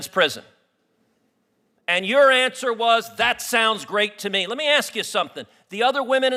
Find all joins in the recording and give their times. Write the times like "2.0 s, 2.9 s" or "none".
none